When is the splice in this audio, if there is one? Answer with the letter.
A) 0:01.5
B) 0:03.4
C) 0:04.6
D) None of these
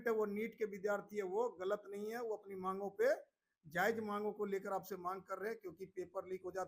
D